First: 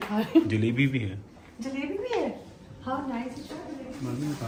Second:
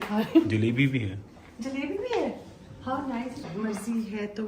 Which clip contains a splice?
second; 1 cut; at 3.5 s

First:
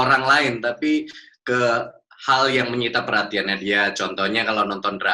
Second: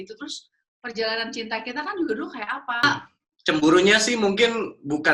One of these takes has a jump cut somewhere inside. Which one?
second; 1 cut; at 2.8 s

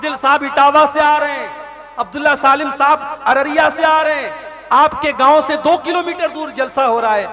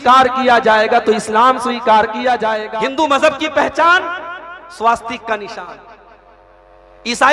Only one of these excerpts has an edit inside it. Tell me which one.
second; 1 cut; at 2.6 s

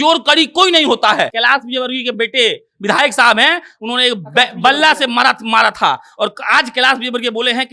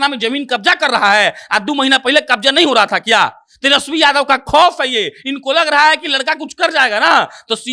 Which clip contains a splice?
first; 1 cut; at 1.3 s

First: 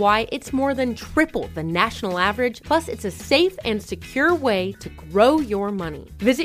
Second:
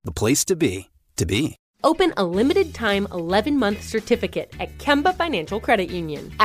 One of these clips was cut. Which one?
second; 1 cut; at 1.6 s

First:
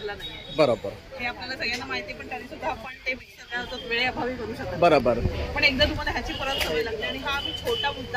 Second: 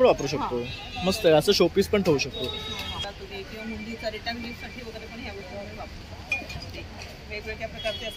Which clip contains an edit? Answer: second; 1 cut; at 2.9 s

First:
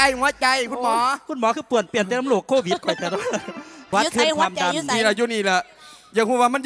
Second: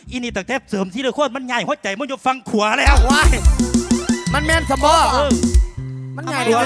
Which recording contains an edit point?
first; 1 cut; at 3.8 s

